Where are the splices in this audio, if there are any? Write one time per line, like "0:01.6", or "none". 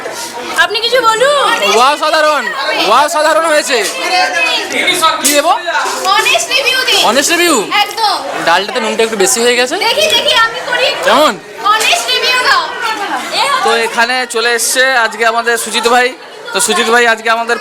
none